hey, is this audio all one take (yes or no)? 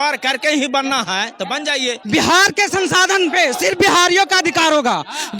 no